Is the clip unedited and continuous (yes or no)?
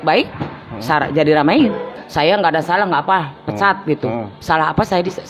no